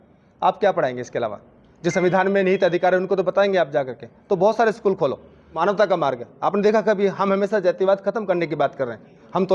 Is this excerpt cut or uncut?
cut